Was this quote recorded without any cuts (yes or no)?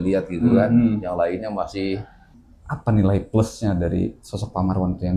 no